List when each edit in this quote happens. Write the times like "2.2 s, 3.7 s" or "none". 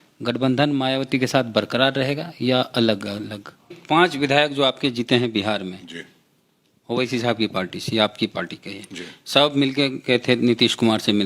3.8 s

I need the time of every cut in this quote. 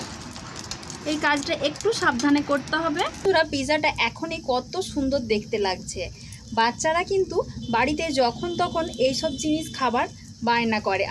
3.3 s

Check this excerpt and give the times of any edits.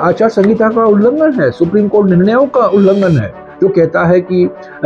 none

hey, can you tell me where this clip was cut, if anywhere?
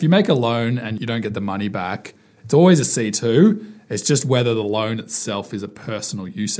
0.9 s

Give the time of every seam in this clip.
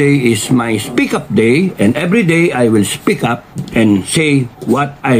none

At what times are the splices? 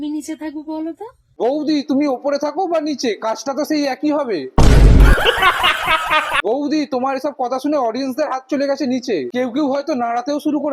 none

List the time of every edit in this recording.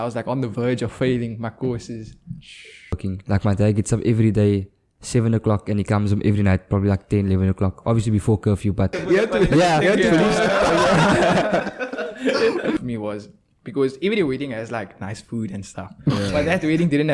3.0 s, 8.9 s, 12.8 s

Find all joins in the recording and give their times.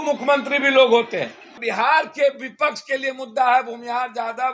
1.6 s

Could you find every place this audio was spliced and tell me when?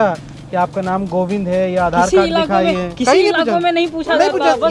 none

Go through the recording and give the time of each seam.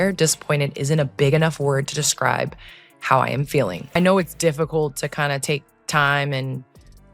3.8 s

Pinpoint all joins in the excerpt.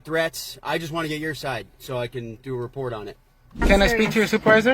3.6 s

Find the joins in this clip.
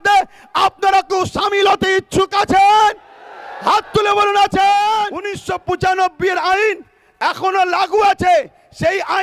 5.4 s

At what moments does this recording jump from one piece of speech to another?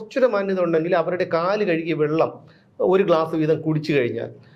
none

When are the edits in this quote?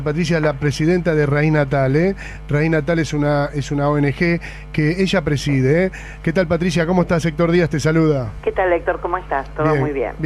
none

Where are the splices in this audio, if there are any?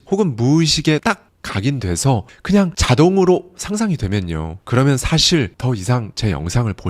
1.0 s, 5.8 s

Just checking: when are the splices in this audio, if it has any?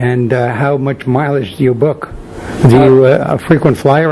1.0 s

